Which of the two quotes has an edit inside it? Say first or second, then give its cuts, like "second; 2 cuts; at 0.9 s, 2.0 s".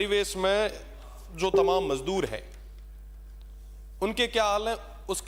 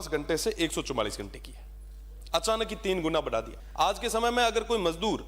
second; 1 cut; at 3.6 s